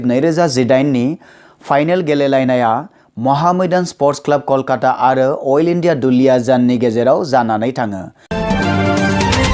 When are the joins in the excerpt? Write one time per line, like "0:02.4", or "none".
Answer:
0:08.2